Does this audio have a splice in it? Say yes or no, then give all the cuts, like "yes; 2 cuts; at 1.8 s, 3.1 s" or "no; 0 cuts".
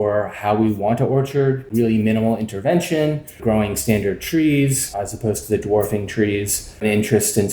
yes; 3 cuts; at 1.7 s, 3.4 s, 6.8 s